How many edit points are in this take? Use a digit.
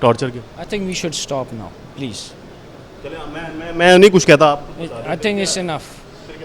0